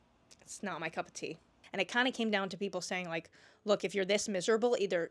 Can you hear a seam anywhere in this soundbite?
yes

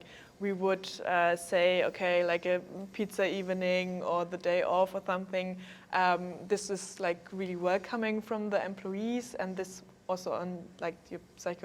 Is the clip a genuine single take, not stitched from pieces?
yes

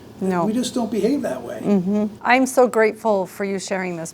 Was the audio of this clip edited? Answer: yes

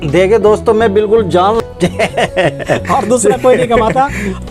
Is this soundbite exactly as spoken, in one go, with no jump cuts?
no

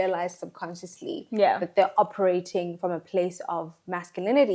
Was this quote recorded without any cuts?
yes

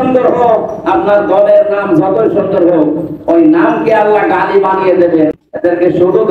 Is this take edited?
yes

